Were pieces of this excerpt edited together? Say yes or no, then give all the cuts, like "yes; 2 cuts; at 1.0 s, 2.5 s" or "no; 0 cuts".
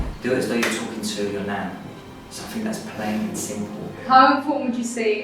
yes; 1 cut; at 3.9 s